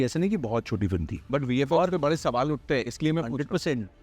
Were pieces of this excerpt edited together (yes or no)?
yes